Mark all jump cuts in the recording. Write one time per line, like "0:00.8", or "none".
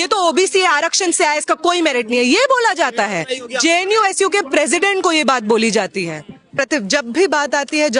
0:06.6